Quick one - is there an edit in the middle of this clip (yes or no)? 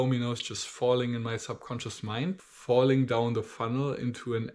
yes